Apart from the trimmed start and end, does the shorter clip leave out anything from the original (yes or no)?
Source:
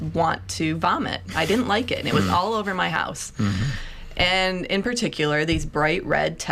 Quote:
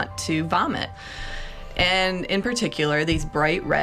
yes